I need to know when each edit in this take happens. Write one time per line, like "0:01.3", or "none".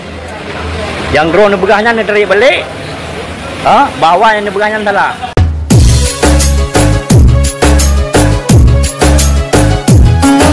0:05.3